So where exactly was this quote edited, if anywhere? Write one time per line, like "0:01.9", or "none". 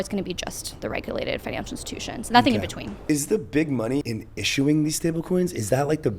0:02.9
0:04.1